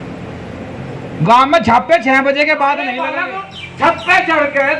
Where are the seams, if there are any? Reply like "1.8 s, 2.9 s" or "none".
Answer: 3.1 s